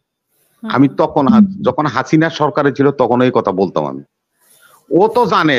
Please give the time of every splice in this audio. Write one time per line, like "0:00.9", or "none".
none